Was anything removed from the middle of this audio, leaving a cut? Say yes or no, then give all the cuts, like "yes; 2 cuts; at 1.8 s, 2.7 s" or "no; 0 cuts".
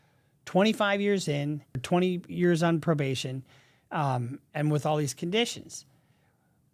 no; 0 cuts